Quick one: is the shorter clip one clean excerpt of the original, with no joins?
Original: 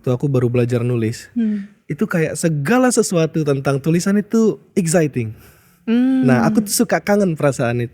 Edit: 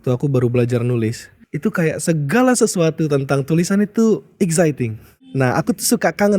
no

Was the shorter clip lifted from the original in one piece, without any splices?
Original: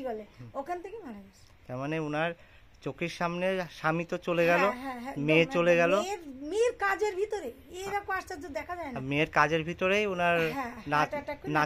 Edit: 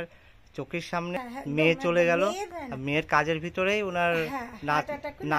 no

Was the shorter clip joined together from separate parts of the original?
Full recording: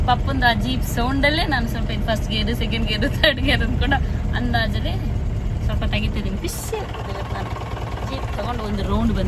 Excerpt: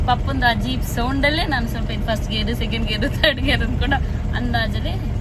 no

